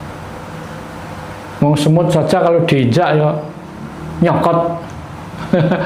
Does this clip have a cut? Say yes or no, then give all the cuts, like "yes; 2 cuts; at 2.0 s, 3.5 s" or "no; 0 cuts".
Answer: no; 0 cuts